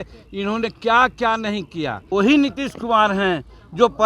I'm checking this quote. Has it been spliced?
yes; 1 cut; at 2.1 s

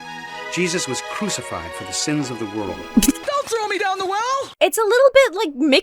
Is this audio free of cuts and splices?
no; 2 cuts; at 3.2 s, 4.5 s

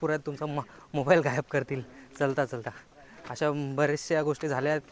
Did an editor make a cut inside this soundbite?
no; 0 cuts

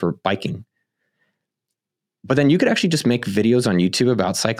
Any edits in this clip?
no; 0 cuts

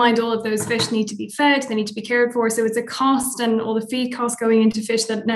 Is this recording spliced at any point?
no; 0 cuts

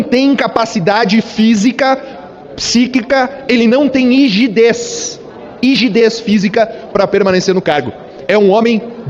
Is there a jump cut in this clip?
no; 0 cuts

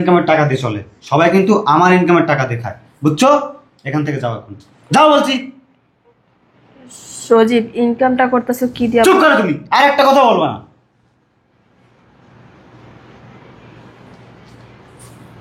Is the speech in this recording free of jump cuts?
yes; 0 cuts

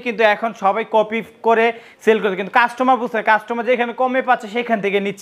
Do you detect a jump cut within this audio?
no; 0 cuts

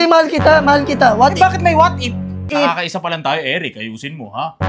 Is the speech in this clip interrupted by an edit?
yes; 1 cut; at 2.5 s

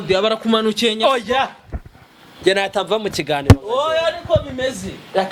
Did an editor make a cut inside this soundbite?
no; 0 cuts

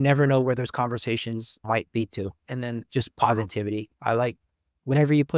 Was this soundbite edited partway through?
yes; 1 cut; at 2.5 s

